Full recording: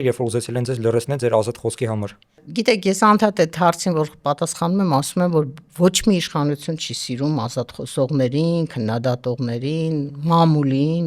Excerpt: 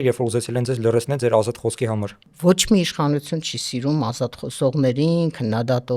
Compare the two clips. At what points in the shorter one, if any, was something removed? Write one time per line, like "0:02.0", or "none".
0:02.3